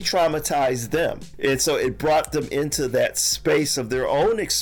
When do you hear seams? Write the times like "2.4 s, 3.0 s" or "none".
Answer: 1.2 s